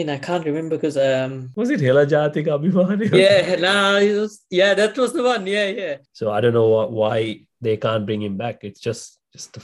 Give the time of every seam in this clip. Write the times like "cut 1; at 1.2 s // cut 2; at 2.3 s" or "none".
cut 1; at 1.4 s // cut 2; at 6.0 s